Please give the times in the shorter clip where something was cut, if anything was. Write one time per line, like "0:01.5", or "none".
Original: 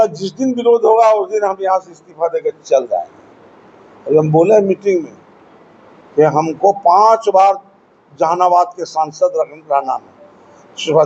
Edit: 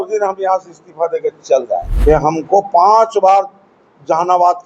0:01.9